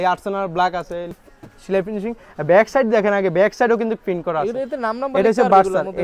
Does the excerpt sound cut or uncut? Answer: cut